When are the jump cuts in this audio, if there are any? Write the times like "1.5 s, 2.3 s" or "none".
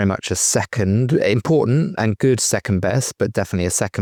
none